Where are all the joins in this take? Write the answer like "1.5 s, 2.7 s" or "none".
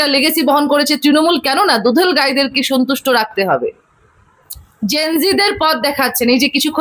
4.6 s